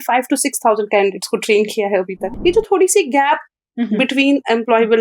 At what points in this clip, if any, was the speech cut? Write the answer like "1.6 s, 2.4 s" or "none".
2.3 s